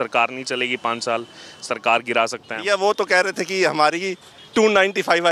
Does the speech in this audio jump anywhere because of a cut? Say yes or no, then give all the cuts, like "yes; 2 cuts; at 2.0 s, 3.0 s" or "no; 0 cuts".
no; 0 cuts